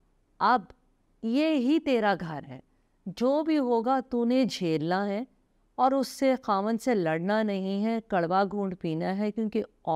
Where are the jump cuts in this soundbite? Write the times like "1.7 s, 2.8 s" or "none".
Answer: none